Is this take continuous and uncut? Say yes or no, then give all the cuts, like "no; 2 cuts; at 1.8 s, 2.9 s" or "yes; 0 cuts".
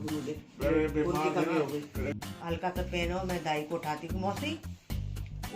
no; 1 cut; at 2.2 s